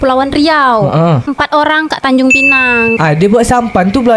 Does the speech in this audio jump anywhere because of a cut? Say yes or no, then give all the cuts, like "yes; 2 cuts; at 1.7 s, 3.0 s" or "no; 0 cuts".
yes; 1 cut; at 3.0 s